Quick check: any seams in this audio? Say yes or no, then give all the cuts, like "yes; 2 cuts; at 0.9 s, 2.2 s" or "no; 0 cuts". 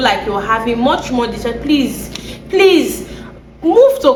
no; 0 cuts